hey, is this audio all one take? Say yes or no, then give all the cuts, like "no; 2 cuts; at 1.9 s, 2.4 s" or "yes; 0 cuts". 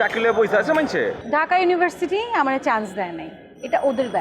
no; 1 cut; at 1.2 s